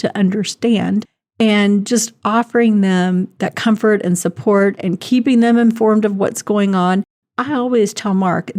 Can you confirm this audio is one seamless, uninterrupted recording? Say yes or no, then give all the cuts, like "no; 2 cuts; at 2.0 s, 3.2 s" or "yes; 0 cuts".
no; 1 cut; at 7.2 s